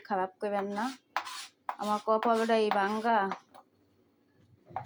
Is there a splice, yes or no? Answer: no